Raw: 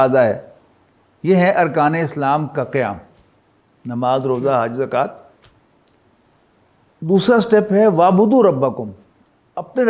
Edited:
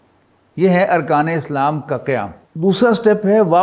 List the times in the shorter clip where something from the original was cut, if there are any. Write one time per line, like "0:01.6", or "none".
0:02.4